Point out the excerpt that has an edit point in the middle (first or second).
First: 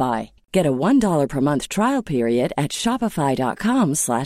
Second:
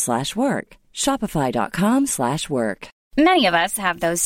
second